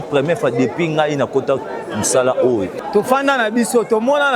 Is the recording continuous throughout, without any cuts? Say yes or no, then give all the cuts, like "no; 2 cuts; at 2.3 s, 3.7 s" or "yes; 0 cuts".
no; 1 cut; at 2.8 s